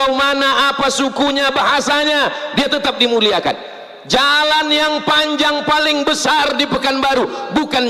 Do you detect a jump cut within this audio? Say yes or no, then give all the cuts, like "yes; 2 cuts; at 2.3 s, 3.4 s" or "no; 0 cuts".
no; 0 cuts